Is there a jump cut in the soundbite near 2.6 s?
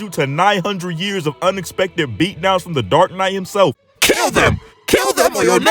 no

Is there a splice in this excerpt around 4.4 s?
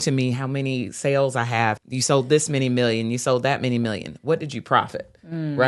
no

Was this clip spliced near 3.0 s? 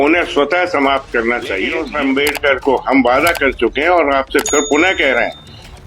no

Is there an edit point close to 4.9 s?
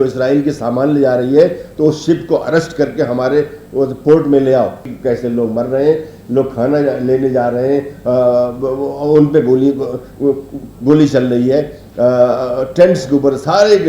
yes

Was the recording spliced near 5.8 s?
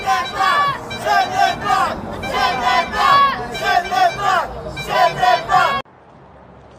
yes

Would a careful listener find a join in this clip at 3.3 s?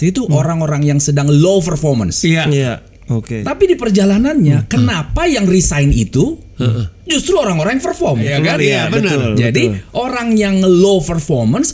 yes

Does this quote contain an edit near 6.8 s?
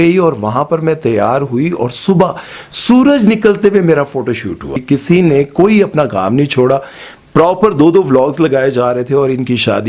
no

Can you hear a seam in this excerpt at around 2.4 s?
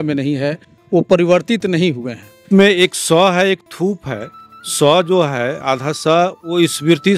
yes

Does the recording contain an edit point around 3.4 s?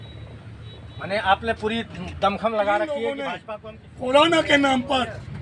yes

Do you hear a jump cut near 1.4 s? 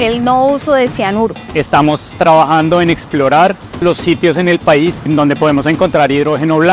yes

